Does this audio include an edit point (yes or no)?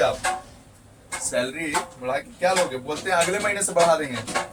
no